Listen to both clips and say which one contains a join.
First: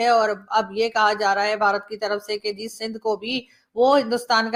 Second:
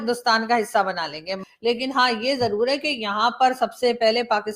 second; 1 cut; at 1.5 s

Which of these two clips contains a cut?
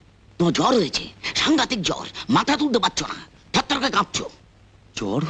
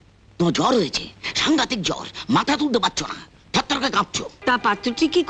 second; 1 cut; at 4.3 s

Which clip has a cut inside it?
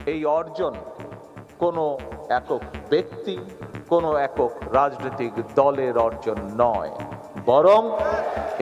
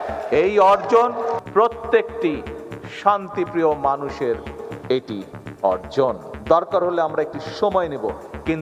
second; 2 cuts; at 1.4 s, 6.3 s

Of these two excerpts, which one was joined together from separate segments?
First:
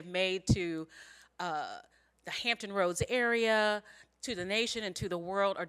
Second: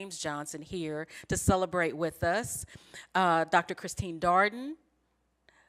first; 1 cut; at 4.7 s

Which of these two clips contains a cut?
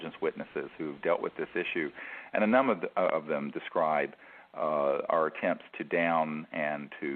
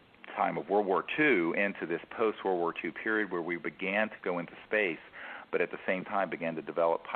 second; 1 cut; at 1.3 s

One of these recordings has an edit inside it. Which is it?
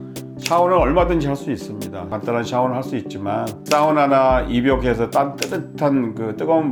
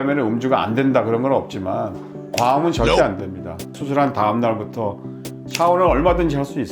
second; 1 cut; at 3.8 s

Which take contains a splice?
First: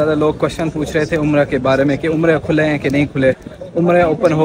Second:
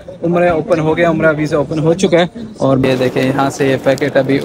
second; 1 cut; at 2.8 s

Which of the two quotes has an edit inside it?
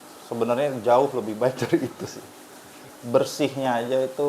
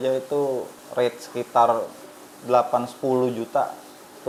first; 1 cut; at 2.9 s

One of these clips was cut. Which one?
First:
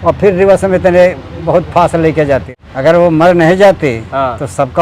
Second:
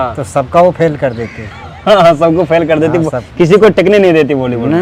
first; 1 cut; at 2.6 s

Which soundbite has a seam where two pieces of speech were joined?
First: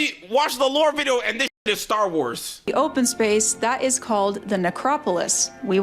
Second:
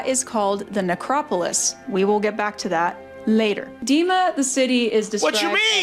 first; 1 cut; at 2.7 s

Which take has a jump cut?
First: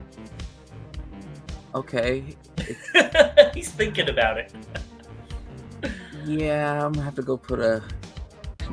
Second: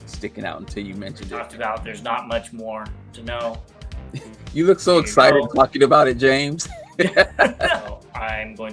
second; 2 cuts; at 1.4 s, 7.8 s

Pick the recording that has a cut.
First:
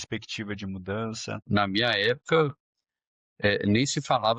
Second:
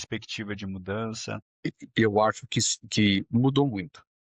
first; 1 cut; at 1.4 s

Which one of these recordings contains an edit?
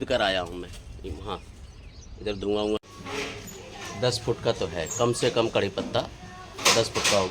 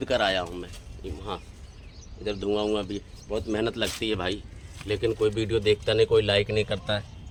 first; 1 cut; at 2.8 s

